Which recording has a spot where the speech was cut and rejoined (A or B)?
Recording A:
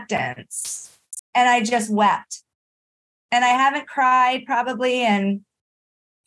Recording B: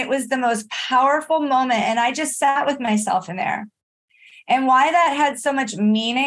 A